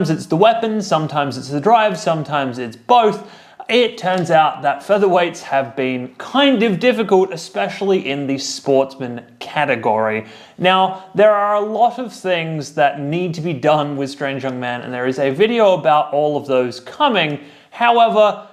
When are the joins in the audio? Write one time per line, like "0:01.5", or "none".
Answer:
0:05.2

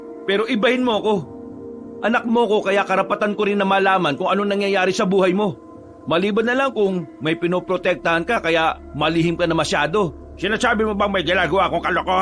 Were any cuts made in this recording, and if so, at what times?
none

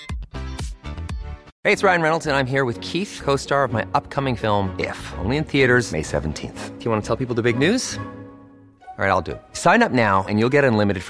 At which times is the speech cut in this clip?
0:01.5

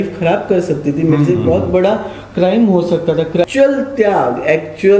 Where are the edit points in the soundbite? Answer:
0:03.5

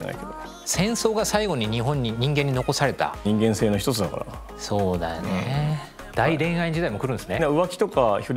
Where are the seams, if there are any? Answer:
0:03.2
0:05.9
0:07.4

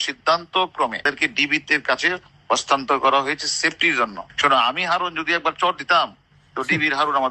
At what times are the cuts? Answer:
0:01.0
0:04.2

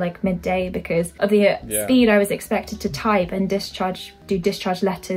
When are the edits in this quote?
0:01.1
0:04.1

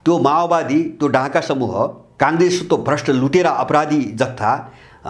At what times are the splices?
0:02.0

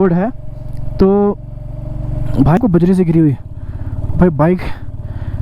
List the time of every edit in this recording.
0:02.6

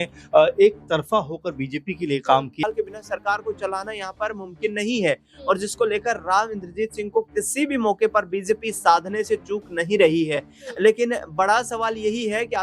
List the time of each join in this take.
0:02.6

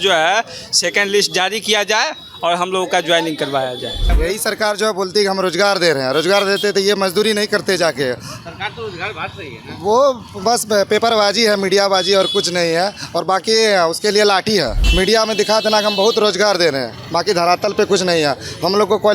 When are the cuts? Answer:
0:04.1
0:14.8

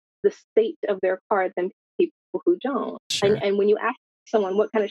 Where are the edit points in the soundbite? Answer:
none

